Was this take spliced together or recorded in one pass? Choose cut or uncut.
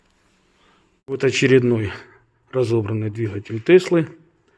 cut